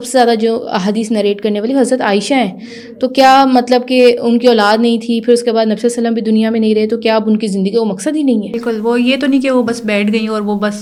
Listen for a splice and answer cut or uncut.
uncut